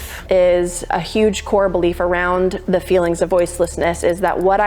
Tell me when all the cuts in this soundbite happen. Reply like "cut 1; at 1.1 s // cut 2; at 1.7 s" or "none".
cut 1; at 3.3 s